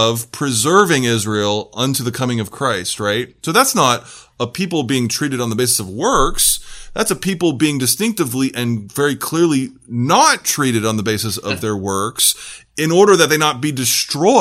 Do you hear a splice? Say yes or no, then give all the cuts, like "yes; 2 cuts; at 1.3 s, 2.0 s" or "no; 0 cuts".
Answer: no; 0 cuts